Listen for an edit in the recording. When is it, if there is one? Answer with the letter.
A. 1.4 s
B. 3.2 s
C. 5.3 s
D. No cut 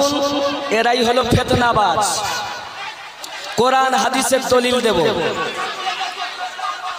D